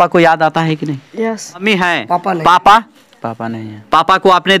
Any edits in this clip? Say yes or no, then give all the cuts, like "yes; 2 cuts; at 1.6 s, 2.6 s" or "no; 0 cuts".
yes; 1 cut; at 1.6 s